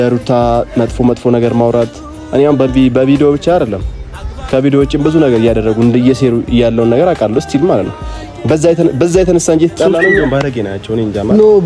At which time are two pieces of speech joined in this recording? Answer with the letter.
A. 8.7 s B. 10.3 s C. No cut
B